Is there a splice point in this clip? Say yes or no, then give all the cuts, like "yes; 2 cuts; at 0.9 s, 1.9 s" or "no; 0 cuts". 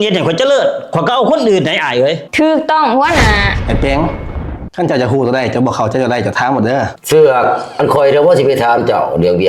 yes; 1 cut; at 3.5 s